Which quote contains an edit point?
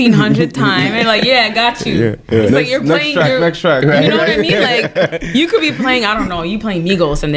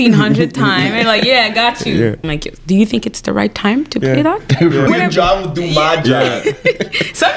second; 2 cuts; at 2.2 s, 4.9 s

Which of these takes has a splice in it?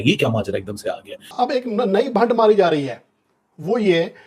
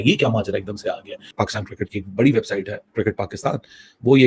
first; 1 cut; at 1.1 s

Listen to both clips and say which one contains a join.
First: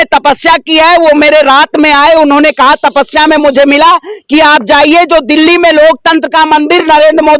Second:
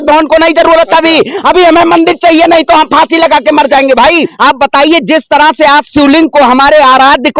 second; 1 cut; at 4.3 s

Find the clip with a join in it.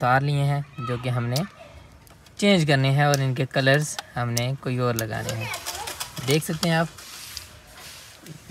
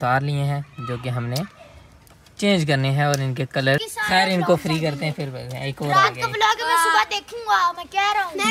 second; 1 cut; at 3.9 s

